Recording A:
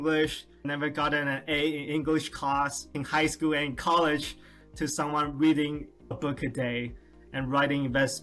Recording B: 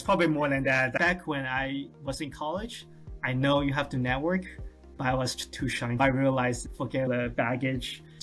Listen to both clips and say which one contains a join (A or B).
B